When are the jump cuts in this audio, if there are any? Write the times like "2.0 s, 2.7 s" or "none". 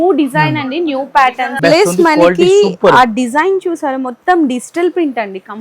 1.6 s